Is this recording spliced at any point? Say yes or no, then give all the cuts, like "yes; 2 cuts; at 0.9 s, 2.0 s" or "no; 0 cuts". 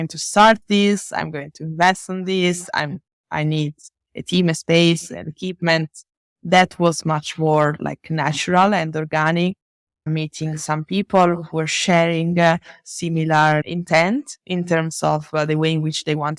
no; 0 cuts